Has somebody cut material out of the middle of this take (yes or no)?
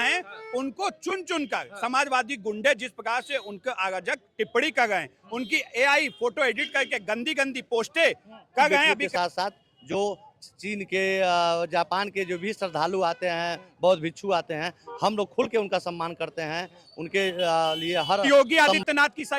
yes